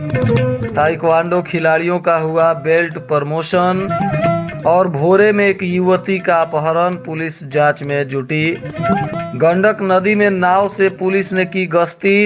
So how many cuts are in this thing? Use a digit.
0